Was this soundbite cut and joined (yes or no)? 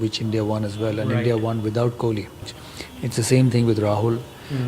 yes